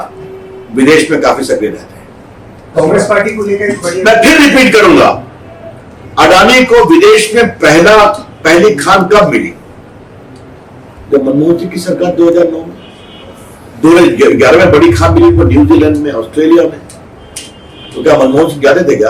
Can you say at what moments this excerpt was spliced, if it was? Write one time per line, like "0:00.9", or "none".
0:04.0